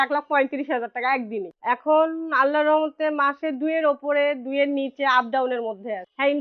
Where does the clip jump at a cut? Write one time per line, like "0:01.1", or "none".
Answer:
none